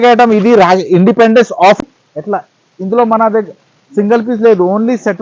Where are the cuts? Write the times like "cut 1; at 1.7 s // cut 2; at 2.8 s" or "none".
cut 1; at 1.8 s